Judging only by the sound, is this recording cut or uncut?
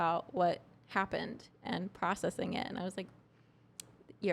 uncut